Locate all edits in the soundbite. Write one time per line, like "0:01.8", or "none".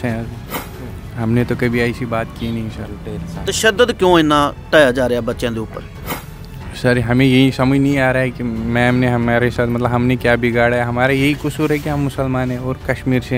none